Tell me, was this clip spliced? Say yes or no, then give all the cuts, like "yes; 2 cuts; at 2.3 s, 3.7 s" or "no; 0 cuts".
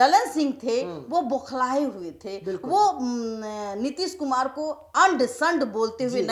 no; 0 cuts